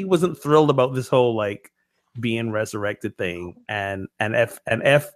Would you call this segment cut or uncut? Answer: uncut